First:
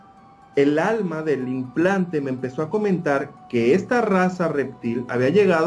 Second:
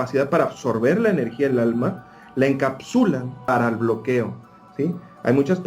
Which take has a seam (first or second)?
second